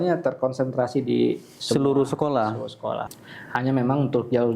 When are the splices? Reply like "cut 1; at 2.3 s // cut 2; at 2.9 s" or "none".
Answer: cut 1; at 3.1 s